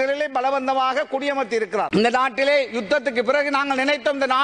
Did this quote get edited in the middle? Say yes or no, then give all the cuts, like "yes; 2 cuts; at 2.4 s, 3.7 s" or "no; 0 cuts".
yes; 1 cut; at 1.9 s